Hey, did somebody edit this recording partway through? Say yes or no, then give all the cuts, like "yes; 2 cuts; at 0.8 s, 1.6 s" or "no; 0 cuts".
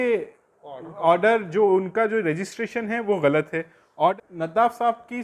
yes; 1 cut; at 3.8 s